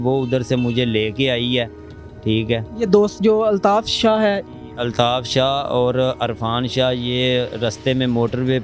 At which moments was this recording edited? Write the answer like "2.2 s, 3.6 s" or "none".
none

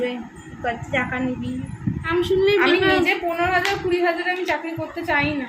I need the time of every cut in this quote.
2.1 s

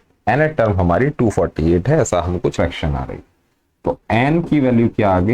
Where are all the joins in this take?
2.5 s

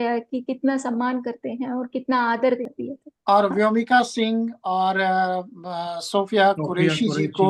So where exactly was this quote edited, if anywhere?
2.7 s

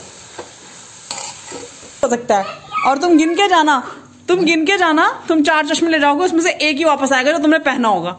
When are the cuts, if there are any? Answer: 2.0 s

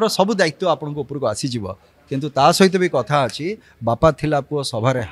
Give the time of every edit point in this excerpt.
none

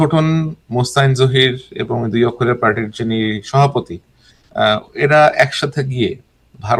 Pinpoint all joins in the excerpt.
none

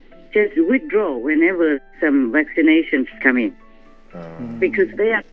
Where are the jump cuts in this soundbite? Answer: none

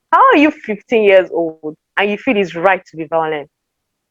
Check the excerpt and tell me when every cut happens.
none

